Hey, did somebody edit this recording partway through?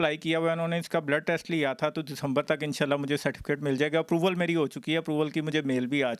no; 0 cuts

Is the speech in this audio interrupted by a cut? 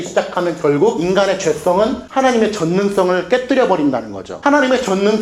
yes; 1 cut; at 1.0 s

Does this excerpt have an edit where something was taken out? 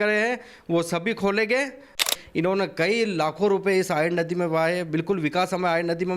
yes; 1 cut; at 2.0 s

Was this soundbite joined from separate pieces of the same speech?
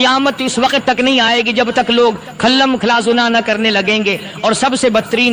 no; 0 cuts

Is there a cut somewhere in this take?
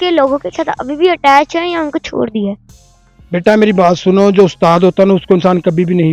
no; 0 cuts

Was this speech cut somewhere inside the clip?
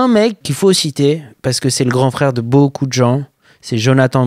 no; 0 cuts

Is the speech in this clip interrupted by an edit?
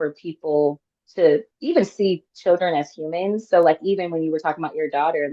no; 0 cuts

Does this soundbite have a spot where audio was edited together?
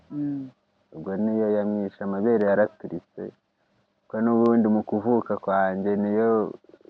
no; 0 cuts

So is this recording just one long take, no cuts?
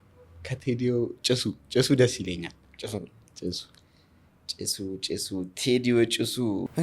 yes; 0 cuts

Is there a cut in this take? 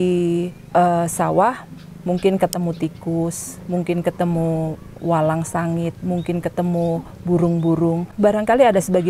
yes; 1 cut; at 8.1 s

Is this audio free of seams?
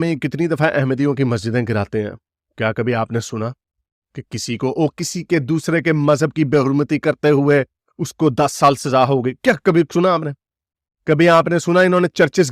yes; 0 cuts

